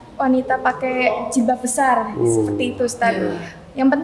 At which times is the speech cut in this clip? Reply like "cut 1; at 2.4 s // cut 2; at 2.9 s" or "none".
none